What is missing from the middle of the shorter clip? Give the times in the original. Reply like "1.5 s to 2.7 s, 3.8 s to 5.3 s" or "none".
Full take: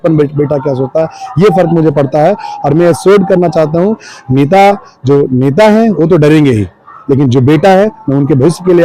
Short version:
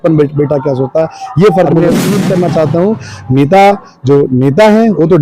1.8 s to 2.8 s